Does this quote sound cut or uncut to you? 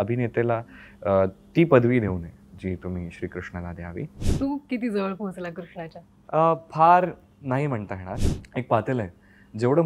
cut